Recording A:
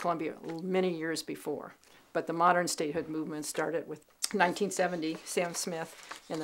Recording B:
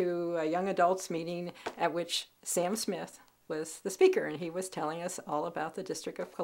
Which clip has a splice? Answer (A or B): A